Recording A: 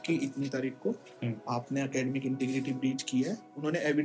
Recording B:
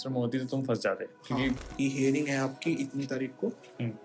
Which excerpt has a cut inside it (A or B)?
B